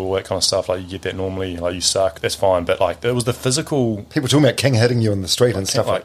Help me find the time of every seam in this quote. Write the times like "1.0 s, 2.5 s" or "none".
2.2 s, 4.0 s